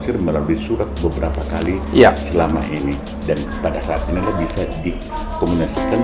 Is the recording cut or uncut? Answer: uncut